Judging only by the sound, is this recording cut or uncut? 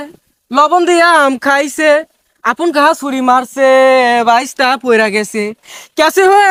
uncut